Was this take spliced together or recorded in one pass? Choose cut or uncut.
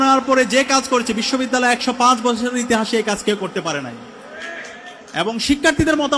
uncut